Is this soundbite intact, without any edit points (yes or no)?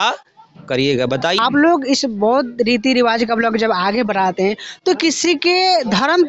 no